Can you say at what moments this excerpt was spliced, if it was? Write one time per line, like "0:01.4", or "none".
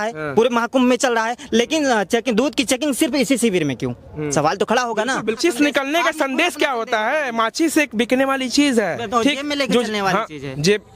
0:05.4